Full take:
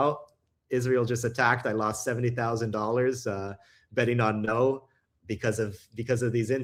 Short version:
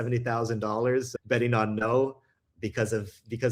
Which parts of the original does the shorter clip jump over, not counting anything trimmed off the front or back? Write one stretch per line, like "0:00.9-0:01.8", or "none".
0:03.3-0:03.8